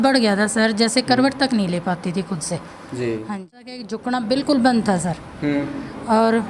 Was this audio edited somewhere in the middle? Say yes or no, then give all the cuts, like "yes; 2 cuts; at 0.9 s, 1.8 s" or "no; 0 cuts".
yes; 1 cut; at 3.9 s